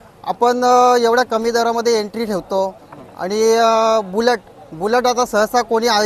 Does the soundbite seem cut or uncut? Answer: uncut